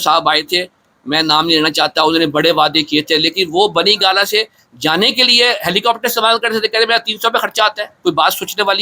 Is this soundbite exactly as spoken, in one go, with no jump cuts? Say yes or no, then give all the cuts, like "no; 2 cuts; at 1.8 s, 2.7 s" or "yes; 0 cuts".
yes; 0 cuts